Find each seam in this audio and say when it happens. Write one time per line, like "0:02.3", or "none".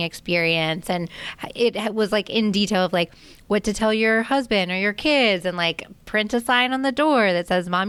none